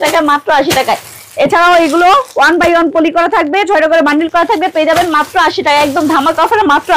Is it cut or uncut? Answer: uncut